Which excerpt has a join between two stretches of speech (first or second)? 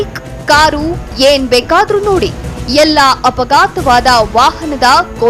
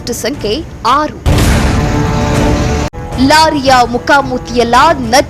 second